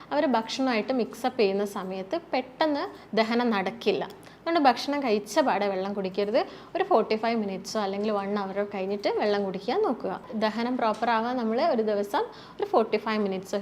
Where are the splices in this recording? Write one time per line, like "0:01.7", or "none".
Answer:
0:10.3

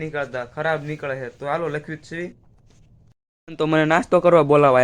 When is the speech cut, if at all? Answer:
0:03.1

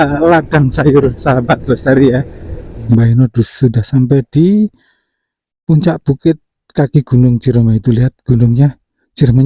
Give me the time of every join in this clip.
0:02.8

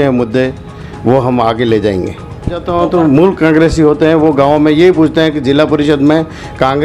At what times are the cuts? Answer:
0:02.6

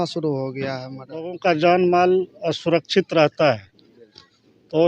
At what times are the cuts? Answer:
0:01.4

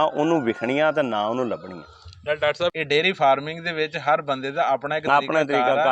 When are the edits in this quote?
0:02.8

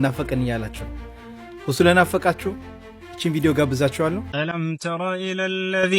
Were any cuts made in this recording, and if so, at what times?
0:04.8

